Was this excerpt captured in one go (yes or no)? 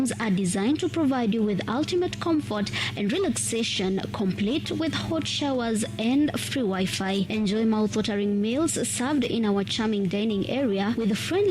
no